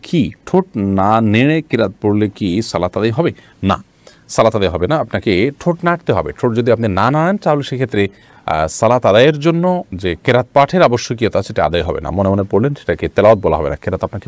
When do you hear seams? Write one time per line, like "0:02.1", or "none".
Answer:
none